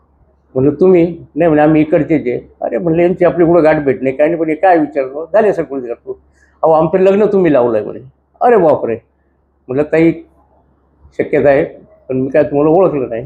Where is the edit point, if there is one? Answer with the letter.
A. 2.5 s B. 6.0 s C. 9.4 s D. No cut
D